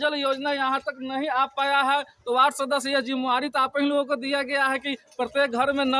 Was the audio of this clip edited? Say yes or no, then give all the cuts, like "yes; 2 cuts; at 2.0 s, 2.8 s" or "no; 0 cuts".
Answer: yes; 1 cut; at 2.2 s